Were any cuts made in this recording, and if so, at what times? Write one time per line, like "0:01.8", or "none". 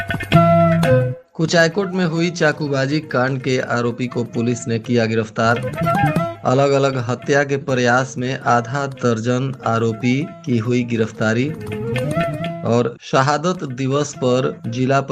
0:01.2